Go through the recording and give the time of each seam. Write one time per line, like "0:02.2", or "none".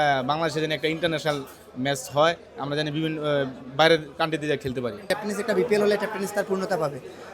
0:05.0